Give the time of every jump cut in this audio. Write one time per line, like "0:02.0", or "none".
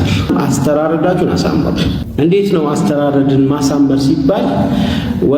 none